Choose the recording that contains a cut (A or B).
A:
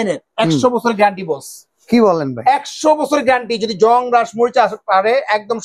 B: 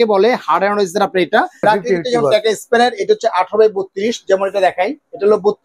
B